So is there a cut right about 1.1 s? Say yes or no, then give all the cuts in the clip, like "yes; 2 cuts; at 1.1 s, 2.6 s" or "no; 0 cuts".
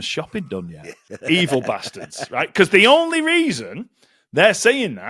yes; 1 cut; at 1.1 s